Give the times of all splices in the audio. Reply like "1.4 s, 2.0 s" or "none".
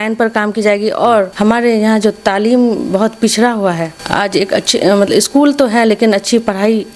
1.3 s, 3.9 s